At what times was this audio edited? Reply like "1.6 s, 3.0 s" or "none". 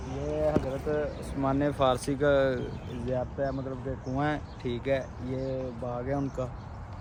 none